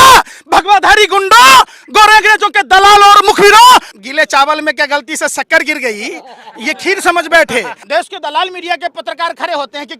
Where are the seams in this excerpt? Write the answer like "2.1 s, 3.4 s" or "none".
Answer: 4.0 s, 7.8 s